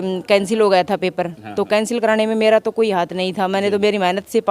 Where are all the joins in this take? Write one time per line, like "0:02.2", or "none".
none